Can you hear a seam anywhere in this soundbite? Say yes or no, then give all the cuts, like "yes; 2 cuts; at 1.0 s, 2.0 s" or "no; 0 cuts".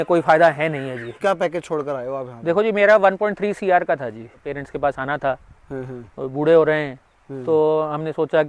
yes; 2 cuts; at 1.2 s, 4.5 s